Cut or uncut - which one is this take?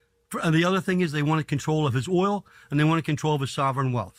uncut